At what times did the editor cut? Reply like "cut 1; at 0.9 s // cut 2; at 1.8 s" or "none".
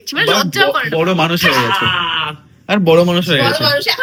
none